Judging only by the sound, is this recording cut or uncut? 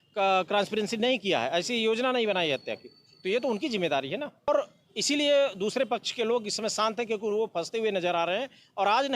cut